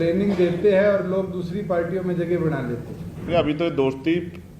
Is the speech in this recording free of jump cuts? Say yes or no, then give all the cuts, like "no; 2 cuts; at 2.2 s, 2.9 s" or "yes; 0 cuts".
no; 1 cut; at 3.3 s